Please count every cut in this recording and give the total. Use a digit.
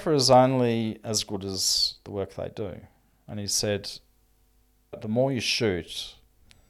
1